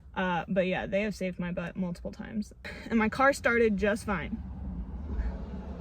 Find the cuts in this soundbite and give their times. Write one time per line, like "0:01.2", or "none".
0:02.8